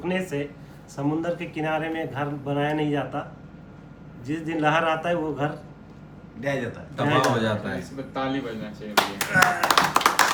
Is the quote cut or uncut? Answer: uncut